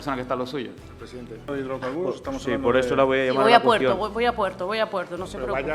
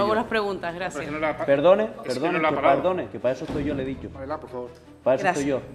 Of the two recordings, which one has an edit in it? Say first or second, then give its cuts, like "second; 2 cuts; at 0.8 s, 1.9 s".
first; 1 cut; at 1.7 s